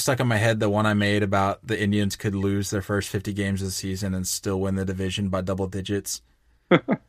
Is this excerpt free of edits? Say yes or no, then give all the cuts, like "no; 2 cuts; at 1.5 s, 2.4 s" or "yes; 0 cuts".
yes; 0 cuts